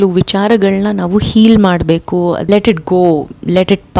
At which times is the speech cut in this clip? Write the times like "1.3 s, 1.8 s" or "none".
2.5 s